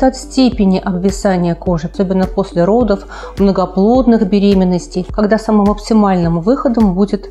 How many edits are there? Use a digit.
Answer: 2